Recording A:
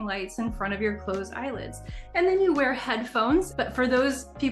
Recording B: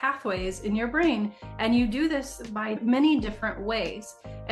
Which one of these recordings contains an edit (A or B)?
A